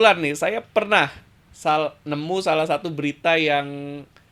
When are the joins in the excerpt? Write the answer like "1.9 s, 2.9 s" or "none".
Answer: none